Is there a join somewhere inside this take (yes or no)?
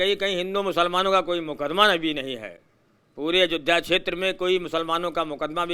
no